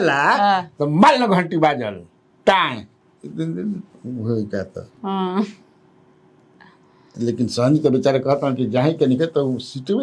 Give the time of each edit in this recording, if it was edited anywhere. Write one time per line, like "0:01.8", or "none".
none